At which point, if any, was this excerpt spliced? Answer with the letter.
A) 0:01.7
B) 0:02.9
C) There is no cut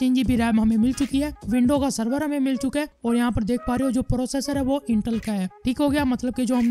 C